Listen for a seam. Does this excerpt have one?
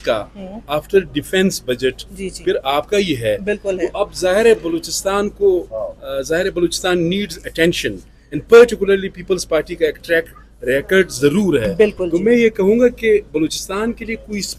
no; 0 cuts

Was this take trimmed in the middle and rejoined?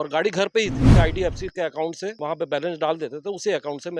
yes; 2 cuts; at 0.9 s, 2.2 s

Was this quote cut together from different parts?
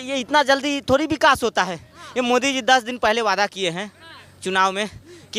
no; 0 cuts

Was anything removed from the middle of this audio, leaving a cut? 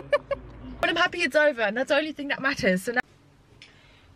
yes; 2 cuts; at 0.8 s, 3.0 s

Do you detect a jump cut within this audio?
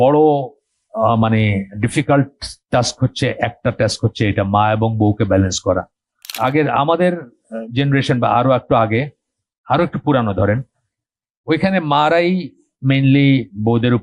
yes; 1 cut; at 6.3 s

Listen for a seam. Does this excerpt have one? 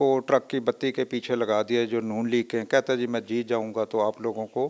no; 0 cuts

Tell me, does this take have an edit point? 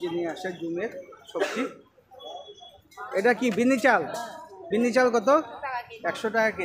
no; 0 cuts

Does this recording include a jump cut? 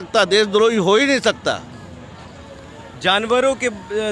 no; 0 cuts

